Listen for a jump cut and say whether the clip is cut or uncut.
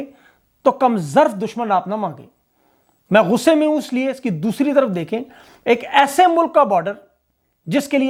uncut